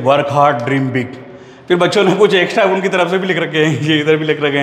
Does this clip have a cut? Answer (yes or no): no